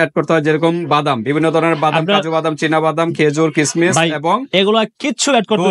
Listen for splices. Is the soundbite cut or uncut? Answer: uncut